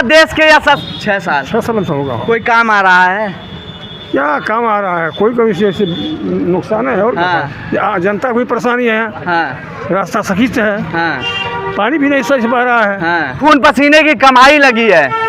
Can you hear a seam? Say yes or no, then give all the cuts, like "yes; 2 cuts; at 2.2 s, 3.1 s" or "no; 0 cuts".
yes; 2 cuts; at 0.8 s, 13.4 s